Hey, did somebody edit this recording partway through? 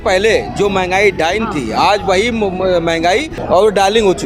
yes; 1 cut; at 3.3 s

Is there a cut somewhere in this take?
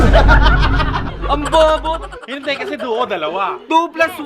yes; 1 cut; at 1.1 s

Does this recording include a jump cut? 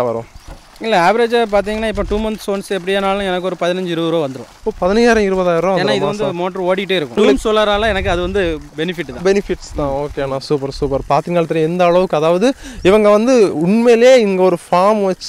no; 0 cuts

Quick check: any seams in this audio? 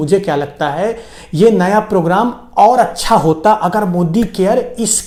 no; 0 cuts

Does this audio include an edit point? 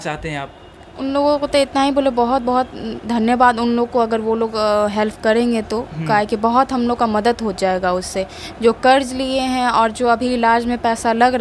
no; 0 cuts

